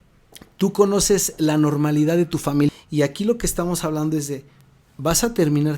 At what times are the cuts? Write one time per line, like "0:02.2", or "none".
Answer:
0:02.7